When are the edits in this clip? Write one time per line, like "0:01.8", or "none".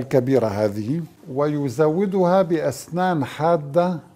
0:01.2

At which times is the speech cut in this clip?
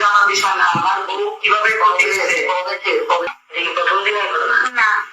0:03.4

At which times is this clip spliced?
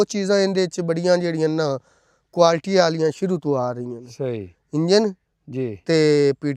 none

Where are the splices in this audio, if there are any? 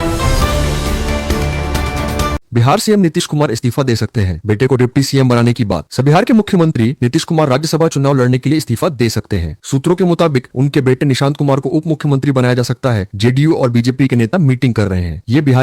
0:02.4

